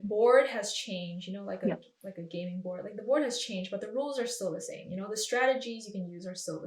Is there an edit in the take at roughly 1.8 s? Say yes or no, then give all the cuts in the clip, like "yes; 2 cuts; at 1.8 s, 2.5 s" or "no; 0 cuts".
no; 0 cuts